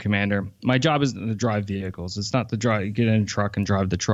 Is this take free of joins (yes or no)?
yes